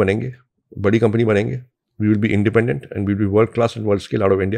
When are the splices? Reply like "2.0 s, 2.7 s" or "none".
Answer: none

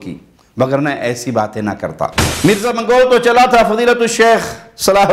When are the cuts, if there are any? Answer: 2.3 s

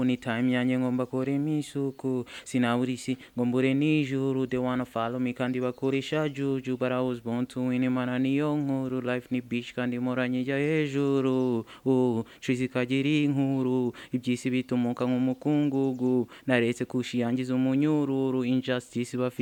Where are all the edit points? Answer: none

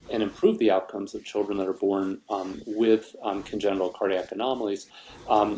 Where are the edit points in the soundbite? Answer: none

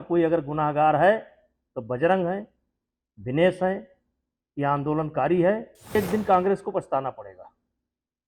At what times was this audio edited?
6.0 s

